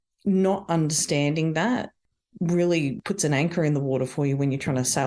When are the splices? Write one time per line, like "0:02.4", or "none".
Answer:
0:03.0